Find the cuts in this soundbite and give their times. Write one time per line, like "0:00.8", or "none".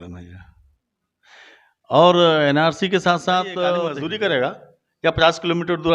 0:04.0